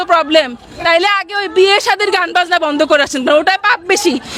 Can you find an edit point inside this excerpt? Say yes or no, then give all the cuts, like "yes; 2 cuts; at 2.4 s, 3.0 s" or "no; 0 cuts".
no; 0 cuts